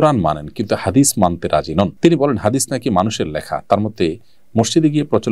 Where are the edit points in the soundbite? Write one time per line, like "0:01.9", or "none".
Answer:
0:01.9